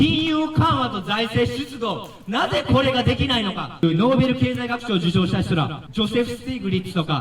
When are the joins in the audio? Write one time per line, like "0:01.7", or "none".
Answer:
0:03.8
0:05.8